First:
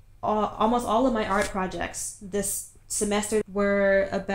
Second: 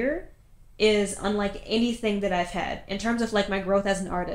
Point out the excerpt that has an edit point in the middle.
first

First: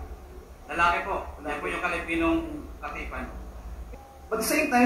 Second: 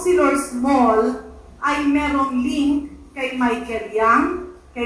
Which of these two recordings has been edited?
first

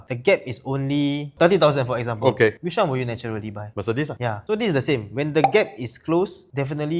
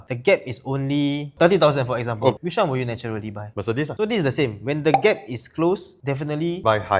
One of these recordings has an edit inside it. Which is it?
second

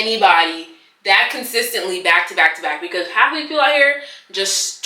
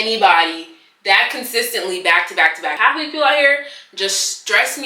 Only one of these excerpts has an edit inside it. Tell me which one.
second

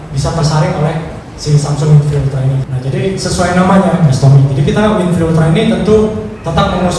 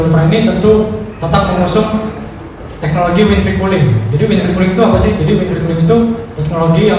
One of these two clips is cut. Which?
first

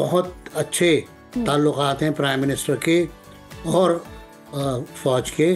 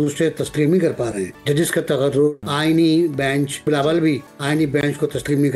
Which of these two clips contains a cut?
second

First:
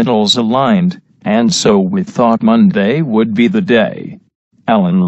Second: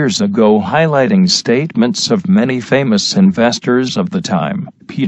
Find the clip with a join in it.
first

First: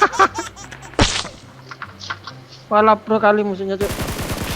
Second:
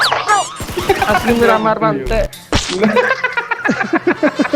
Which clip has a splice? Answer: first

